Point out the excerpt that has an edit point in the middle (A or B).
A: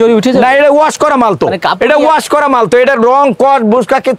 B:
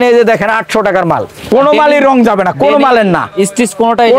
B